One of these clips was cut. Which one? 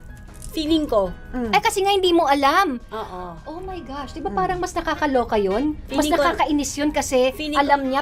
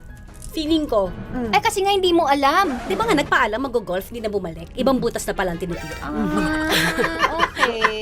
second; 1 cut; at 2.8 s

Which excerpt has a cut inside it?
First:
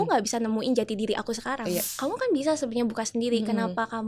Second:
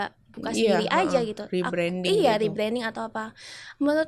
first; 1 cut; at 1.9 s

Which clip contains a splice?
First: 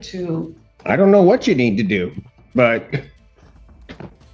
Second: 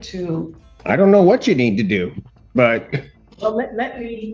second; 1 cut; at 3.2 s

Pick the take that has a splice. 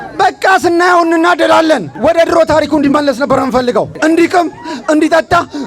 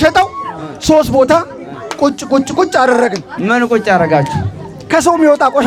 first; 2 cuts; at 1.9 s, 3.9 s

